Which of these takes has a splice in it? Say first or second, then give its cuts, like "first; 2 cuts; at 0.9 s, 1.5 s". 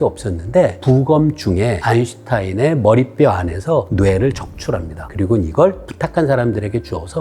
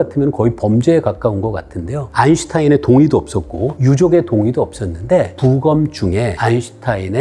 first; 3 cuts; at 3.9 s, 5.0 s, 5.9 s